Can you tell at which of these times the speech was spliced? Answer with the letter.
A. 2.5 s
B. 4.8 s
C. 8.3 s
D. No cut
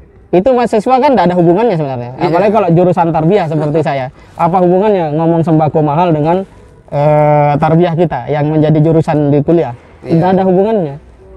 D